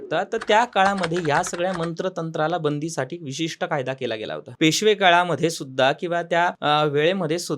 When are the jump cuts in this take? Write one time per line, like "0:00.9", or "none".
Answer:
0:04.4
0:06.6